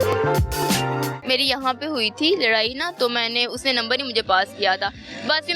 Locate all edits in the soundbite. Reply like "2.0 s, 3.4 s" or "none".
1.2 s